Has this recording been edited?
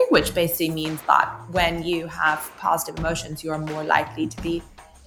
no; 0 cuts

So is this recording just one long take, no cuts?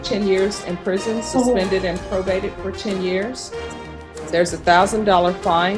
yes; 0 cuts

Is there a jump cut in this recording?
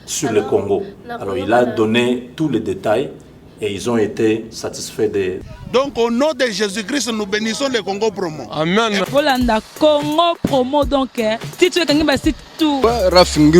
yes; 1 cut; at 5.5 s

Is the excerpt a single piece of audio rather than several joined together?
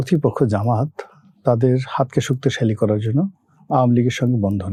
yes; 0 cuts

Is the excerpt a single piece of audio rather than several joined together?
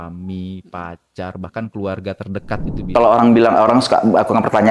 no; 1 cut; at 2.9 s

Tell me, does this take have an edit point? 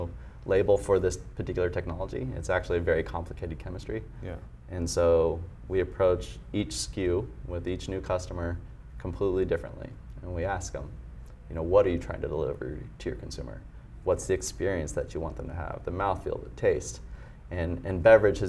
no; 0 cuts

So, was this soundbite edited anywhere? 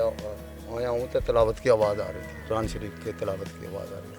no; 0 cuts

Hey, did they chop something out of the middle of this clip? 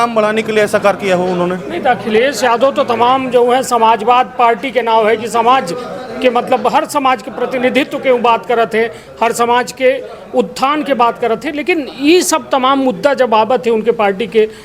no; 0 cuts

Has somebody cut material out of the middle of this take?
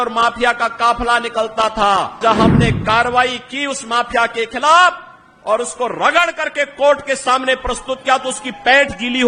yes; 1 cut; at 2.2 s

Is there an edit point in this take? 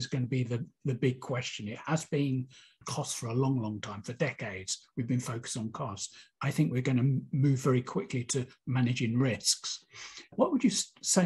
yes; 1 cut; at 2.8 s

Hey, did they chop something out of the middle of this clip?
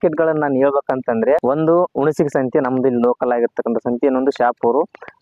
no; 0 cuts

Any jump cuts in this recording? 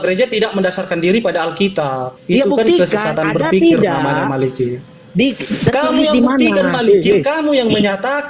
yes; 1 cut; at 2.1 s

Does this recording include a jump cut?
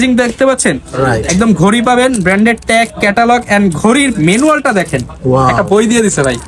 no; 0 cuts

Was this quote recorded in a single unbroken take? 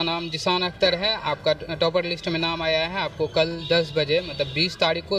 yes; 0 cuts

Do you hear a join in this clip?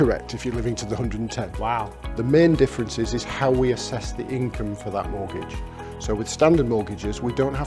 no; 0 cuts

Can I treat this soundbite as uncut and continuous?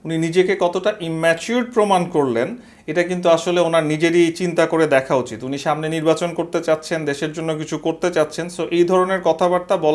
yes; 0 cuts

